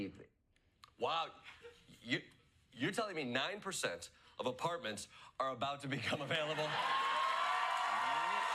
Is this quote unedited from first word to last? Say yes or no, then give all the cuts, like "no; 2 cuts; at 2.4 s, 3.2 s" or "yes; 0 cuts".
yes; 0 cuts